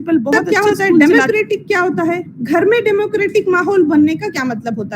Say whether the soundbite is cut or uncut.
cut